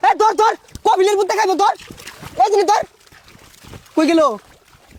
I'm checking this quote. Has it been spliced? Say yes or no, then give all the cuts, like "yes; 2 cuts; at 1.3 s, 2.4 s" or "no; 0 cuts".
no; 0 cuts